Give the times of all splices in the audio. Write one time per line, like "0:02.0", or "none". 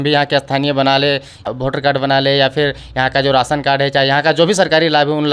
0:01.5